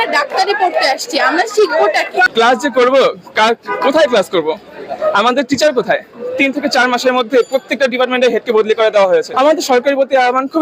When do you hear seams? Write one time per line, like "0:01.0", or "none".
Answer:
0:02.3
0:06.2
0:09.3